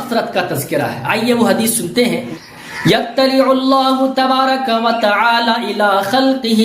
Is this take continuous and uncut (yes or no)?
no